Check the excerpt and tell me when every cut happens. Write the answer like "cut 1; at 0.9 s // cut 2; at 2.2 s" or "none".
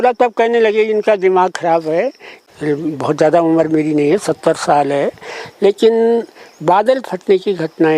cut 1; at 2.3 s